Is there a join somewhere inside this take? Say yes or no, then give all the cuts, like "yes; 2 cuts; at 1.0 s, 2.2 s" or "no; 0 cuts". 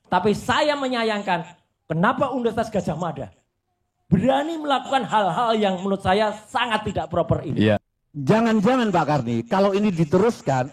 yes; 1 cut; at 7.8 s